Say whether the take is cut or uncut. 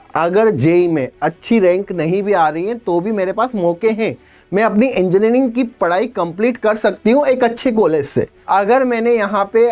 cut